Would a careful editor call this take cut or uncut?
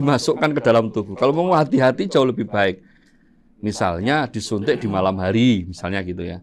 uncut